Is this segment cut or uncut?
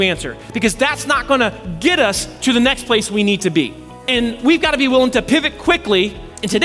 uncut